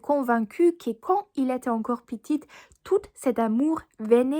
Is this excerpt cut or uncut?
uncut